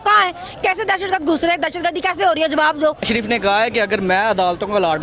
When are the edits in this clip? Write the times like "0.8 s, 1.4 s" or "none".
3.0 s